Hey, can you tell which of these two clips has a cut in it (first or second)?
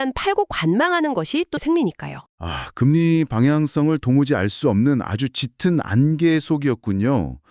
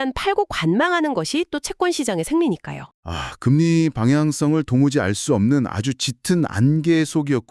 first